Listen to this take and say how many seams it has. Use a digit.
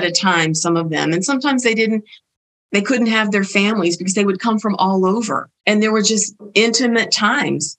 2